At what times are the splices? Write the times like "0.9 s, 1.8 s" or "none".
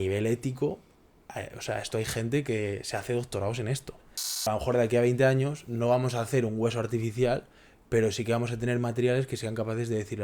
4.4 s

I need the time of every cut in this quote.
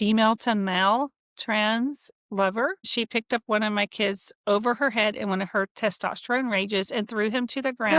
2.9 s

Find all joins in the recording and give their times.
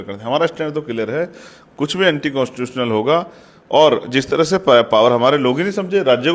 none

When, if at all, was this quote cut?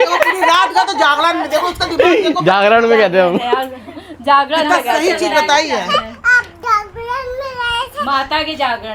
none

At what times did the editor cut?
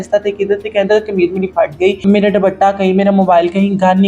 2.0 s

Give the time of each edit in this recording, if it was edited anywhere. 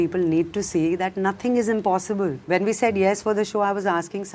2.4 s

